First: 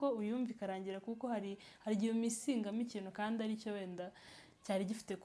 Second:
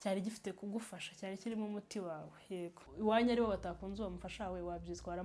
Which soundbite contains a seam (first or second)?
second